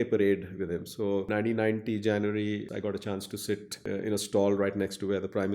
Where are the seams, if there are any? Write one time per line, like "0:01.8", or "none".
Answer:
0:01.3
0:02.7
0:03.8